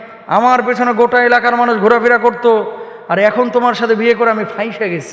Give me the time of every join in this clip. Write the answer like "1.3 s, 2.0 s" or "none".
none